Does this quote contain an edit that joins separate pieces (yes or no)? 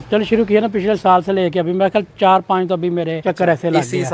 yes